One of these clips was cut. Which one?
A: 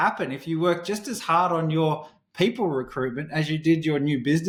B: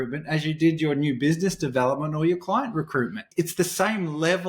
B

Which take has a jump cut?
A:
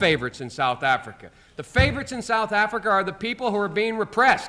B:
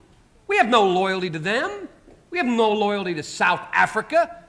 A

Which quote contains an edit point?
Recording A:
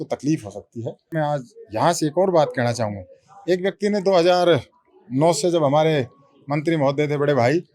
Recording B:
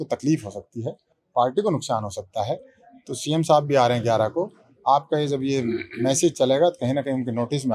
A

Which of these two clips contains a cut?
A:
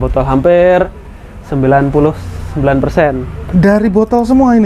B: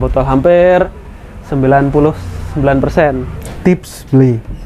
B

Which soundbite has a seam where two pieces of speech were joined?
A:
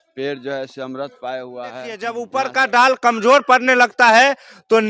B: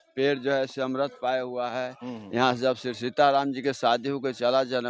A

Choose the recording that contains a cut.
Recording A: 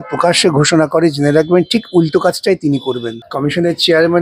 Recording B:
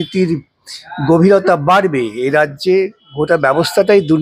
A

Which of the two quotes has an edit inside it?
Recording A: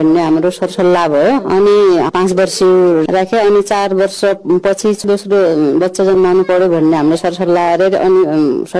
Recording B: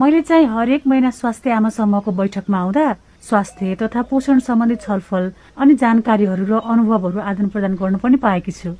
B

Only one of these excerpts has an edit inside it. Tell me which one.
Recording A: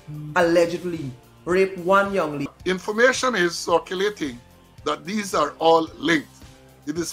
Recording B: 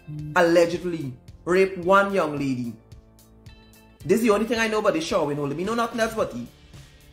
A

